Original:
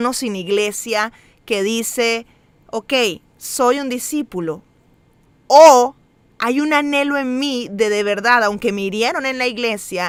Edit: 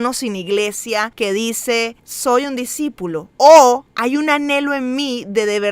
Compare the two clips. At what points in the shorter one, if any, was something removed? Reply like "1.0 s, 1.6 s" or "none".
1.1 s, 2.0 s, 3.3 s, 3.9 s